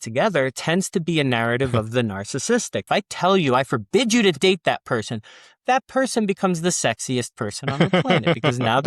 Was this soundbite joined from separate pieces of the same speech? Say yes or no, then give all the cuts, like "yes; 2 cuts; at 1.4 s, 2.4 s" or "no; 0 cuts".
yes; 1 cut; at 2.8 s